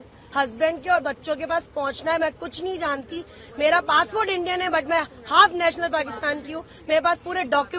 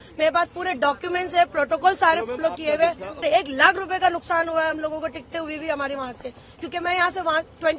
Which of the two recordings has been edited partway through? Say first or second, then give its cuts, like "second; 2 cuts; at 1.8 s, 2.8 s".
second; 1 cut; at 3.2 s